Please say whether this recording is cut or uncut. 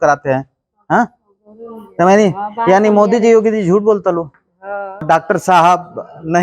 cut